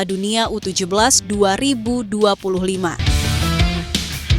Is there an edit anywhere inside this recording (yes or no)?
yes